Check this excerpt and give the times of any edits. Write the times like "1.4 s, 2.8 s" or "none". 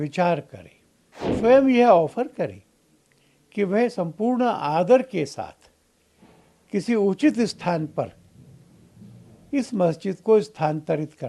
1.3 s